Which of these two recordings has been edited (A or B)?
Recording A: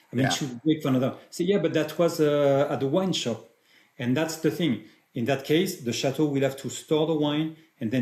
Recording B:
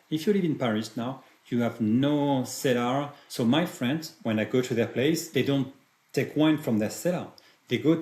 B